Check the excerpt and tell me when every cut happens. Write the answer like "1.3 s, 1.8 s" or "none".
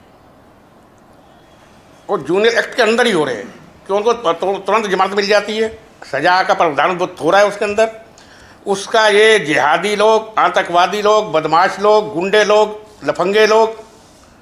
none